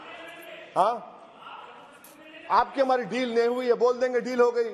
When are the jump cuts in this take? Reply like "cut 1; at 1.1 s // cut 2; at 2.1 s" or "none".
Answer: none